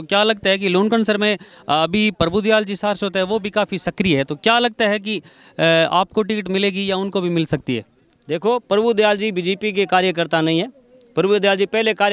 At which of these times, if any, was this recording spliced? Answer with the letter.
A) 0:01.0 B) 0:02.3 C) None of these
C